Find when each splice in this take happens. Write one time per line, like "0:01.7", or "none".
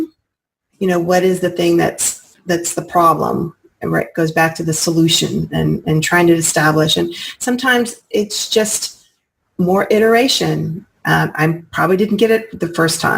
none